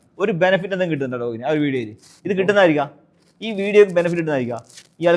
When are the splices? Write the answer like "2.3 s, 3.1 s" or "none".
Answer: none